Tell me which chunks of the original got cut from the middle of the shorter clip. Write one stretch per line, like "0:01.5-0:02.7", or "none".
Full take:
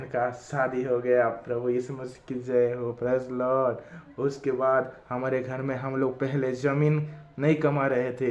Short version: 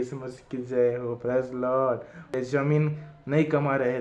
0:04.1-0:06.4